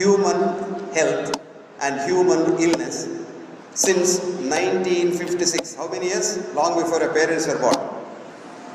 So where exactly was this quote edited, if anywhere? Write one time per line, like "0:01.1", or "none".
none